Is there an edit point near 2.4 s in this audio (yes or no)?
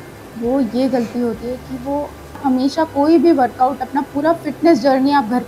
yes